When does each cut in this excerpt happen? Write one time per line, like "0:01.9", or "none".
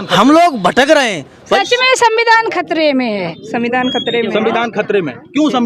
0:01.5
0:03.4